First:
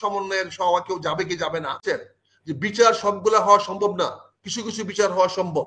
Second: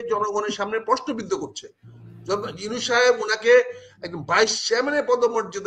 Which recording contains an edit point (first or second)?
first